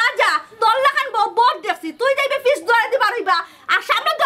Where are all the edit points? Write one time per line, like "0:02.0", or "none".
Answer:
none